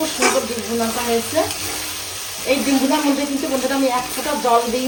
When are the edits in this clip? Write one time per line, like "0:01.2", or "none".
none